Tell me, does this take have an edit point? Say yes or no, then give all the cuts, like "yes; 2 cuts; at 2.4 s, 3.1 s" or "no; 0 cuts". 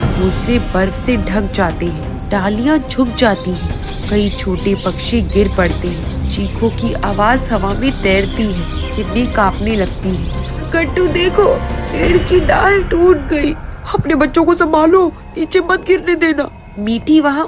no; 0 cuts